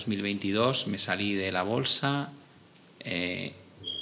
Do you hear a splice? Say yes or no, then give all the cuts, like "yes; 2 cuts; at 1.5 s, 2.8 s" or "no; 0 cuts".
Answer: no; 0 cuts